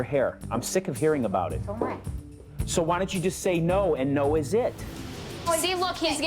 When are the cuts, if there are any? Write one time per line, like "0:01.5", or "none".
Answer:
0:04.8